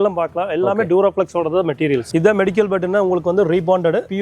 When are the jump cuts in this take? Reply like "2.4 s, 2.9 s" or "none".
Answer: 2.1 s